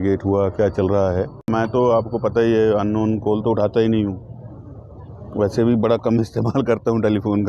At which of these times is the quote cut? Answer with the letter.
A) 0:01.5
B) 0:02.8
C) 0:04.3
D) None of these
A